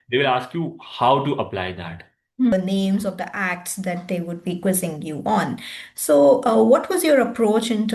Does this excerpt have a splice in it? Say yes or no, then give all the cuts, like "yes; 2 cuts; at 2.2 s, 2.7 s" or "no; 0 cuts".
yes; 1 cut; at 2.5 s